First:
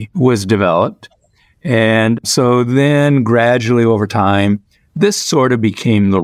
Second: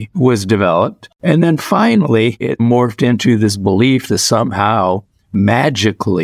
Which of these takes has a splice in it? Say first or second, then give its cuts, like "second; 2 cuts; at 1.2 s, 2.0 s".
second; 1 cut; at 1.1 s